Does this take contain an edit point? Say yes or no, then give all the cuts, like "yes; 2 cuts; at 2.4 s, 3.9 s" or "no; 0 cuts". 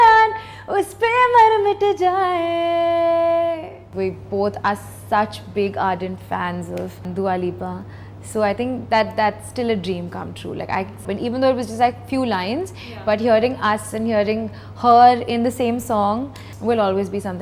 yes; 4 cuts; at 3.9 s, 7.0 s, 11.0 s, 16.4 s